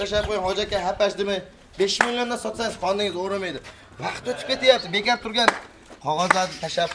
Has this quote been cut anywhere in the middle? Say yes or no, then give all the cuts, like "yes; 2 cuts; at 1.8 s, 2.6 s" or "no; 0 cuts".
no; 0 cuts